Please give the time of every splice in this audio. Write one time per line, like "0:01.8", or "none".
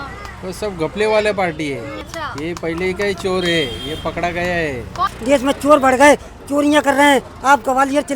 0:02.0
0:05.1